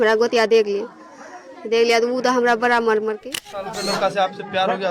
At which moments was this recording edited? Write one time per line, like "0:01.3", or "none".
0:03.7

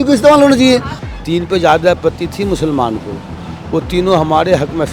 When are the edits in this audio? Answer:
0:01.0

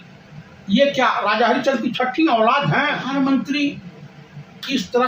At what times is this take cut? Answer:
0:03.0

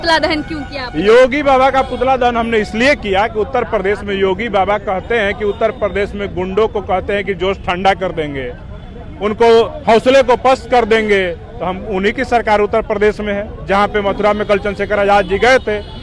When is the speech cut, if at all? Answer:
none

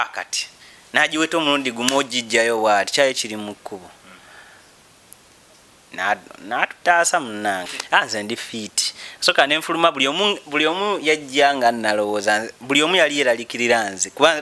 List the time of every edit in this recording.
0:07.7

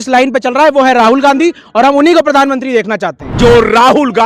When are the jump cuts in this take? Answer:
0:03.2

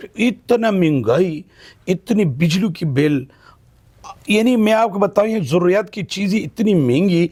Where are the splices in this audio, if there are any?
none

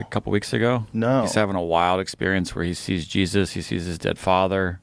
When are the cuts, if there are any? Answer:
none

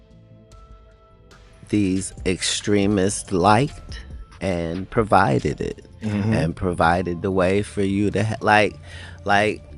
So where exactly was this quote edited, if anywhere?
0:01.6

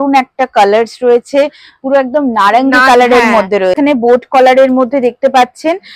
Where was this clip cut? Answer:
0:03.8

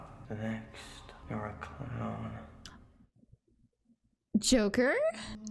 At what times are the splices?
0:04.1

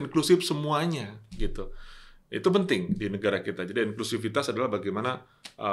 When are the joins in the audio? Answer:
none

